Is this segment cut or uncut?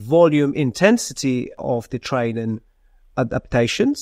cut